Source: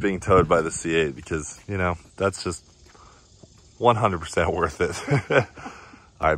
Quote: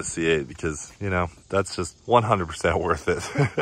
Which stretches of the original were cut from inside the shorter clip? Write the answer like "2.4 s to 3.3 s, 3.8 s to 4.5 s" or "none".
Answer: 2.6 s to 3.7 s